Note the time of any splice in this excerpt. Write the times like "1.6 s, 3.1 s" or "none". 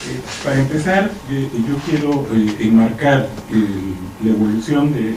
2.9 s